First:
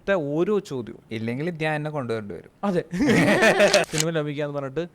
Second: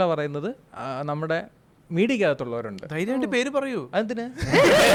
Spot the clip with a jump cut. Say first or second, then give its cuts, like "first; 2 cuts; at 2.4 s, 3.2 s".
first; 3 cuts; at 1.0 s, 2.4 s, 3.9 s